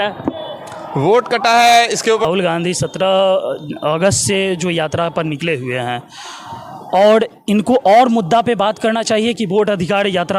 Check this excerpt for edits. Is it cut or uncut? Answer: cut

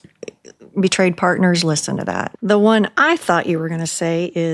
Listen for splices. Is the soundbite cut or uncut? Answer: cut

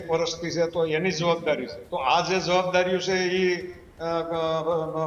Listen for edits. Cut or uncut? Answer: cut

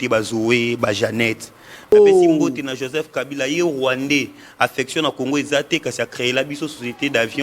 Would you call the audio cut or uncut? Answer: cut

